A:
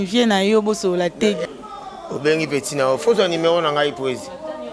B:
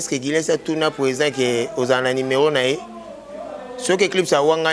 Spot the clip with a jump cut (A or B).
A